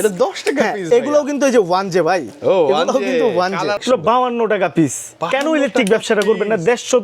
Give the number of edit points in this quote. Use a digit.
1